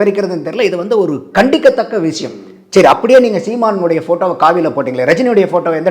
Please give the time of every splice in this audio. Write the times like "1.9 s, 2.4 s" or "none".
none